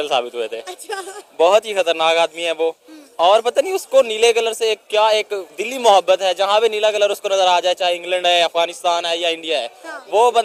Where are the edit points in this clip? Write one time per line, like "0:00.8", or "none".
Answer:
none